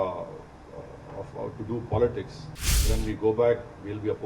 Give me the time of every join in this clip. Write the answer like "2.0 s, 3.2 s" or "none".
2.8 s